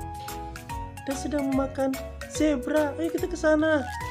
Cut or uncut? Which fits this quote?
cut